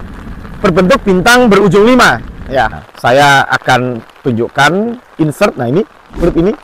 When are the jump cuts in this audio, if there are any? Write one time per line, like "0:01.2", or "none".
0:02.8